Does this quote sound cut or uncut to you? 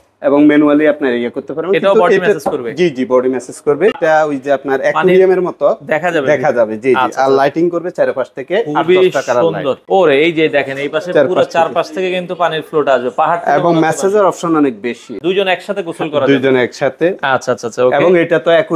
cut